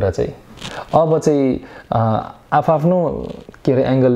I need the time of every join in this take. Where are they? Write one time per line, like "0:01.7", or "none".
none